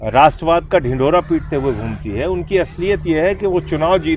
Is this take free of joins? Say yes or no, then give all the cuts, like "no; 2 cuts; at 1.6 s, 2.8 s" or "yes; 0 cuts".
yes; 0 cuts